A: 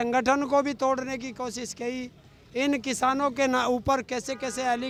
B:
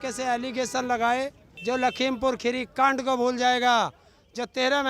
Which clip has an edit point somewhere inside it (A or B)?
B